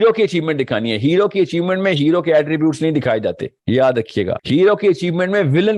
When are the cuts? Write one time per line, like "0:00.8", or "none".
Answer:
0:03.5
0:04.4